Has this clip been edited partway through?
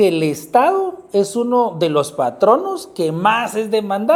no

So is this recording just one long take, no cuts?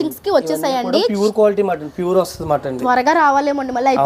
yes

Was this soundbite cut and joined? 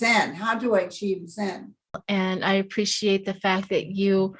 yes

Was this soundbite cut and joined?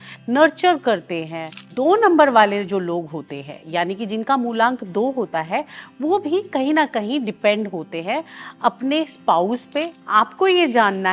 yes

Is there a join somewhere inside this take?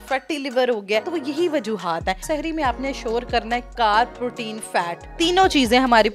yes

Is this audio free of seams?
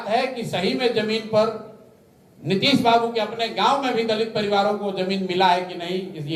yes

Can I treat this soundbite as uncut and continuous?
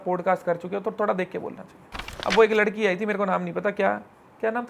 no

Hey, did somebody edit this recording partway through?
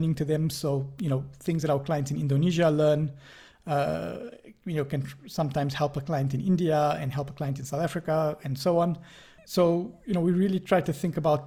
no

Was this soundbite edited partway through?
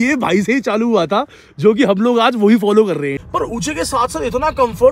yes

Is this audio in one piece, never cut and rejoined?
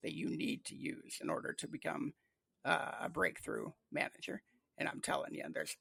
yes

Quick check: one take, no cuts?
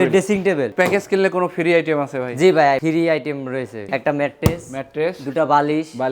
no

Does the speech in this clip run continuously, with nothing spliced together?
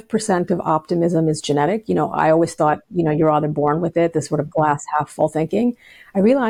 yes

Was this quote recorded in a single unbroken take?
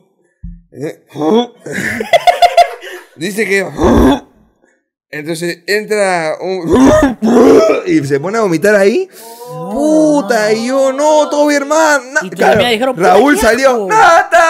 yes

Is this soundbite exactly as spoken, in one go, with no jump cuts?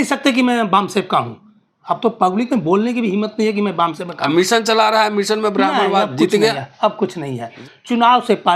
no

